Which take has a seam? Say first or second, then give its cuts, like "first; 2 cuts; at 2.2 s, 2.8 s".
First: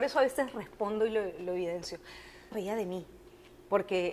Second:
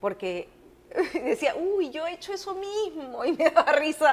first; 1 cut; at 2.5 s